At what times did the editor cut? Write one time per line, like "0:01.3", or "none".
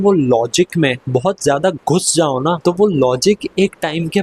0:01.0
0:02.6